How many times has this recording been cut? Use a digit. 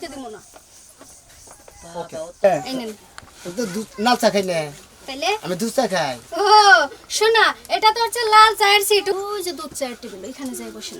1